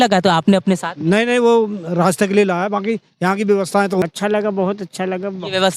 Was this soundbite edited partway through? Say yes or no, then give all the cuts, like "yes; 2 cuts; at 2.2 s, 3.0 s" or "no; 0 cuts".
yes; 1 cut; at 4.0 s